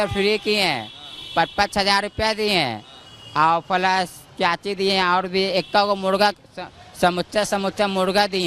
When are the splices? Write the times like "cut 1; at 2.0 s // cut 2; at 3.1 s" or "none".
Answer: none